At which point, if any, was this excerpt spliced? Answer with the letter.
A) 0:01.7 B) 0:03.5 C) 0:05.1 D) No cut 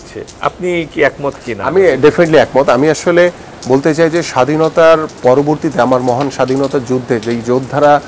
D